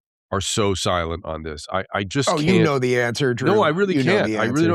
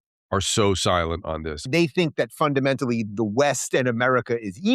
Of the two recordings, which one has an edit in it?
second; 1 cut; at 1.7 s

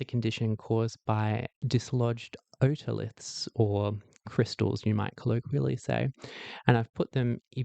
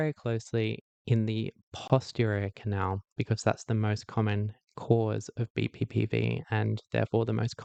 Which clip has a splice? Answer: first; 1 cut; at 1.5 s

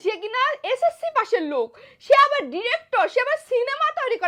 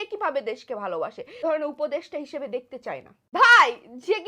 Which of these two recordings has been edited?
second; 2 cuts; at 1.4 s, 3.1 s

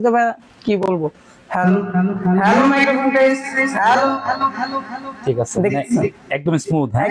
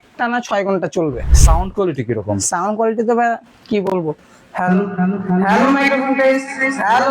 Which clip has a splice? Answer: second; 1 cut; at 1.4 s

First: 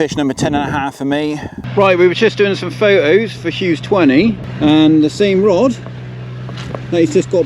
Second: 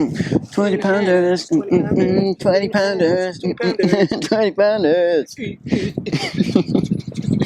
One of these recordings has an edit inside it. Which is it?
first; 2 cuts; at 1.6 s, 4.5 s

